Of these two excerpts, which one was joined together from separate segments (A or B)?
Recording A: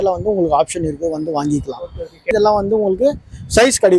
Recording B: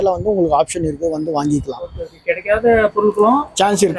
A